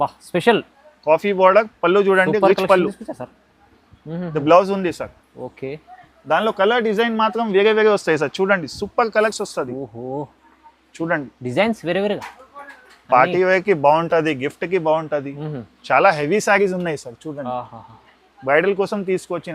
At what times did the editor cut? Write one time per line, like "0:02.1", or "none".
none